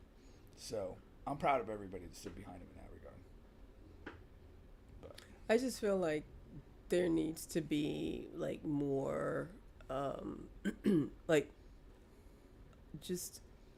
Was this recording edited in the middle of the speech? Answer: no; 0 cuts

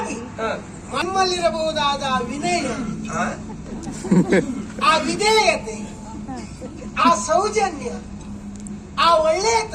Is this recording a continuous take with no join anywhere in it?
no; 1 cut; at 1.0 s

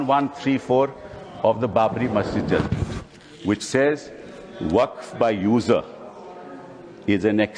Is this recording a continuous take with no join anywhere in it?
yes; 0 cuts

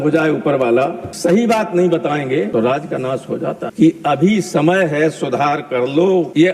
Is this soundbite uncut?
no; 1 cut; at 3.7 s

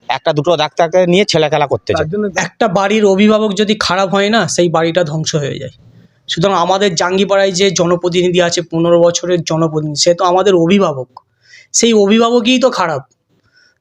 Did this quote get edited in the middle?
yes; 1 cut; at 2.1 s

